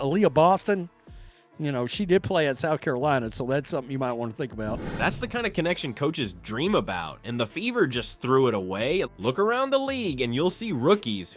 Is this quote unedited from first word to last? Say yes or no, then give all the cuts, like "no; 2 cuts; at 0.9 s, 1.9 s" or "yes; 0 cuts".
yes; 0 cuts